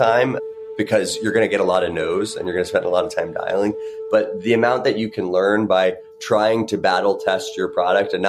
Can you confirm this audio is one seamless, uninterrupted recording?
yes; 0 cuts

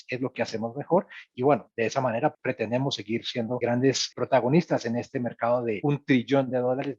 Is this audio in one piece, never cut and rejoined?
no; 4 cuts; at 1.3 s, 2.4 s, 3.9 s, 5.8 s

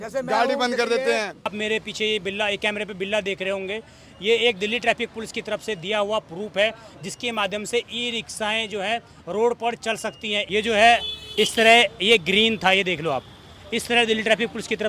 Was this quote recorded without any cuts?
no; 2 cuts; at 1.5 s, 10.5 s

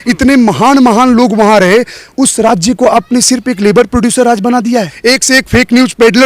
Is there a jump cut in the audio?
yes; 1 cut; at 4.9 s

